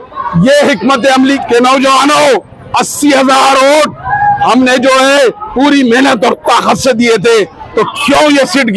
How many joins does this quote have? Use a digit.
1